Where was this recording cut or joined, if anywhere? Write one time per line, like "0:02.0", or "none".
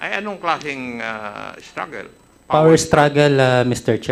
none